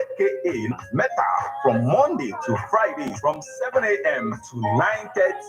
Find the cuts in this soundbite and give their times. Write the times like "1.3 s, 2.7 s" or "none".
1.5 s